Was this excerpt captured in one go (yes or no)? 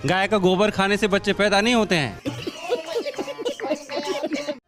yes